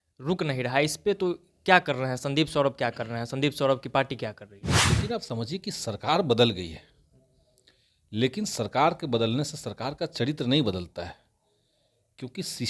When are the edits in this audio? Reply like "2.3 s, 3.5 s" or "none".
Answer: 4.8 s